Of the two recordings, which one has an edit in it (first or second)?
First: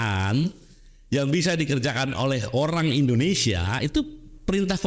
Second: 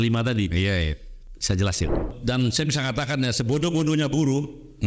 second